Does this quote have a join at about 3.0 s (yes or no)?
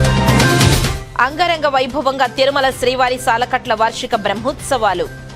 no